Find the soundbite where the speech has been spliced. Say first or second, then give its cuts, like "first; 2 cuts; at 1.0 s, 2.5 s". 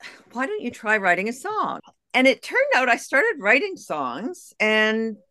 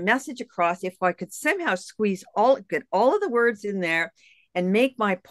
first; 1 cut; at 1.8 s